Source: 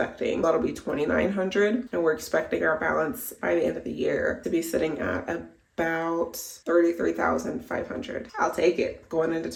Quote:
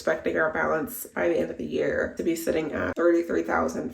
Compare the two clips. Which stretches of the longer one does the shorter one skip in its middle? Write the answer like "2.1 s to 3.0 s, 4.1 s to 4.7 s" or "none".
5.2 s to 6.6 s